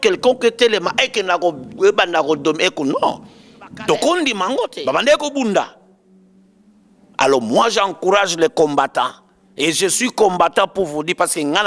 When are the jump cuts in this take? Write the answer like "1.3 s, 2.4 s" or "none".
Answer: 4.8 s